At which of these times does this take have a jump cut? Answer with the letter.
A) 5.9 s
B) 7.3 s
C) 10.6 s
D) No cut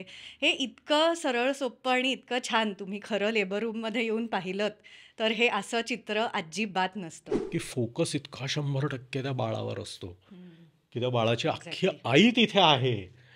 B